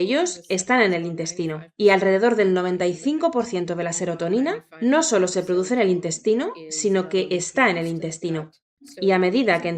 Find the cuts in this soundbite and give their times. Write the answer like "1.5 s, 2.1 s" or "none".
8.5 s